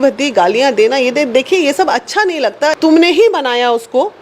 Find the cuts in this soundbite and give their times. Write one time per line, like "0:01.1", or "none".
0:02.7